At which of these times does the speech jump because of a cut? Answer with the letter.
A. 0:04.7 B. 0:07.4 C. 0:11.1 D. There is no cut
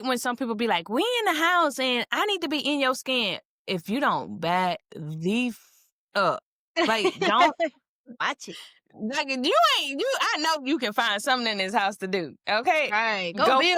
D